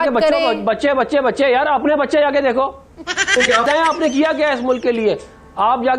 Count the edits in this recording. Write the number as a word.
one